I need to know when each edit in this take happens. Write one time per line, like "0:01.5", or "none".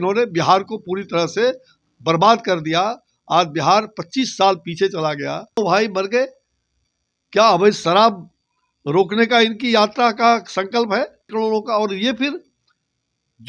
0:05.6
0:11.3